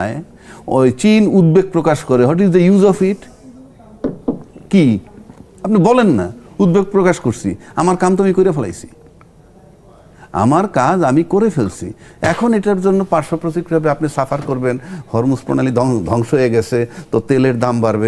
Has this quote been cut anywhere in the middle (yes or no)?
no